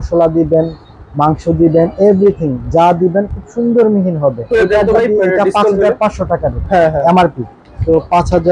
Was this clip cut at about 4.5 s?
yes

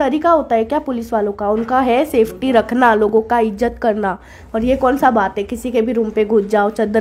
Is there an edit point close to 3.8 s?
no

